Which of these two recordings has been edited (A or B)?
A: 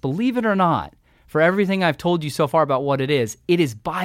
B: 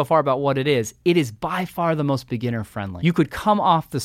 B